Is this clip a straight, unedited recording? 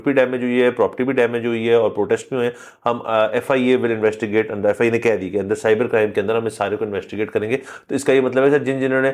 yes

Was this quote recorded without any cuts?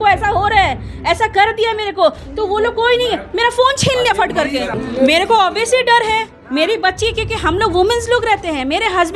yes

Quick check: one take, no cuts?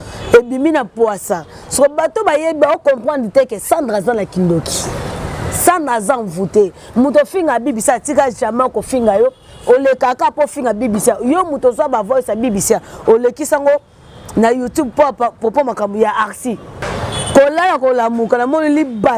no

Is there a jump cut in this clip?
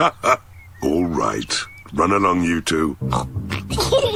no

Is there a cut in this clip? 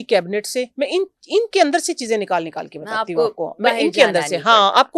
no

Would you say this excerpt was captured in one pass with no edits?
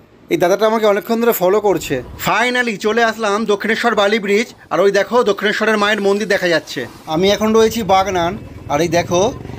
no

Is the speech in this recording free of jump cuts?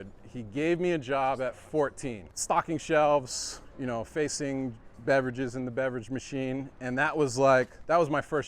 yes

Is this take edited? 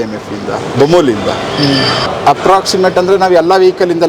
yes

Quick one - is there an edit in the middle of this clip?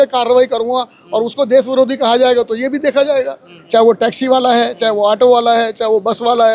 yes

